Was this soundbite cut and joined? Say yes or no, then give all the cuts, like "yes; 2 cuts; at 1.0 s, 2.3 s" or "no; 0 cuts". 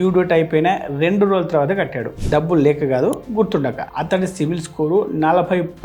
no; 0 cuts